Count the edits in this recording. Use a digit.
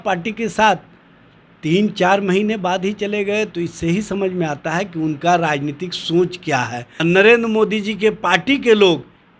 1